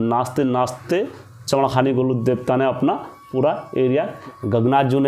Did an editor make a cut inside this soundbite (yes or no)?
yes